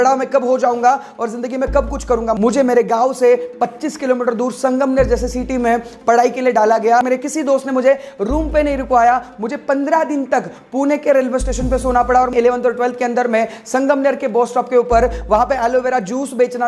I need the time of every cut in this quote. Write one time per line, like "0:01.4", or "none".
0:02.4
0:07.0
0:12.3